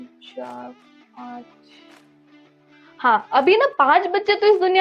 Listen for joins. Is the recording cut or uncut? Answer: uncut